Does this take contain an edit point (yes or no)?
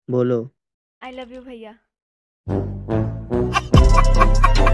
yes